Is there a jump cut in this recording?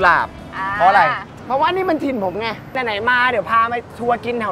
yes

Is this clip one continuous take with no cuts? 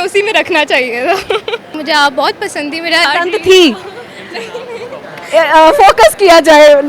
no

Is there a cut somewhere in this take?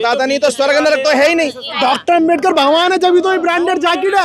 yes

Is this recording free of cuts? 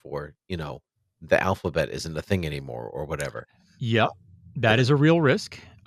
yes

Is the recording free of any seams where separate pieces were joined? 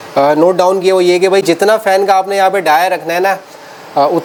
yes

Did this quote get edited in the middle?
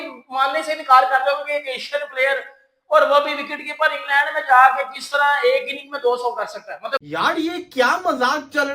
yes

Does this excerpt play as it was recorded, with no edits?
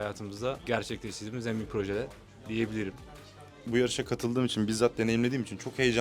no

